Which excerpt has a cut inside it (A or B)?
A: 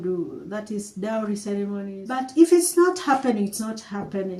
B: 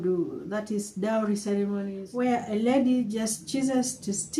B